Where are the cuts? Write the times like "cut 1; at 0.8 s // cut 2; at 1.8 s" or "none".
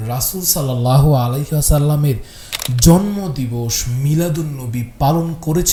none